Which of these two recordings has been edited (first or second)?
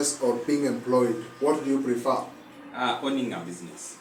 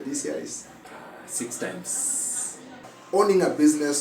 second